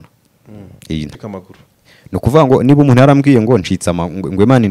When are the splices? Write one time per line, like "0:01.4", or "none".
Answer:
0:01.1